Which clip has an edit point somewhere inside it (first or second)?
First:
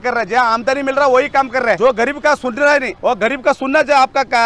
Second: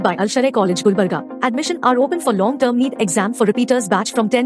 first